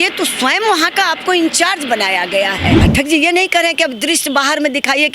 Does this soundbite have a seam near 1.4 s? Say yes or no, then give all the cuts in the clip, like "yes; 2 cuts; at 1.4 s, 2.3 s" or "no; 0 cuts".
no; 1 cut; at 2.8 s